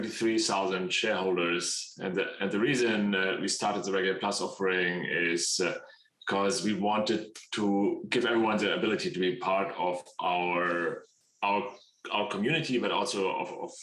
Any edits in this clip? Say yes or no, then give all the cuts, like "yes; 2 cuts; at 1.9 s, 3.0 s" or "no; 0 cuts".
no; 0 cuts